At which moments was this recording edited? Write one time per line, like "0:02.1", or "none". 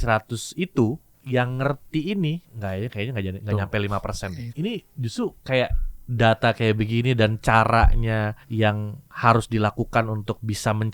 0:01.1
0:02.5
0:04.5
0:08.4